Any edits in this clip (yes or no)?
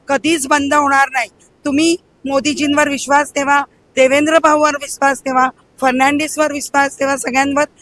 no